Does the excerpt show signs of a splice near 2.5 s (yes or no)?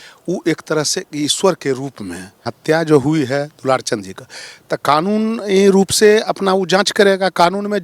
yes